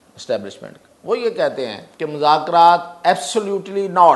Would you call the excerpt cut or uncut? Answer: cut